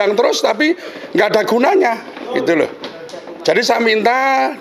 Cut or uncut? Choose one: uncut